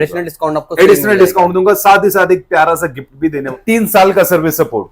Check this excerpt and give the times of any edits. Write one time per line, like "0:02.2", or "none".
0:03.5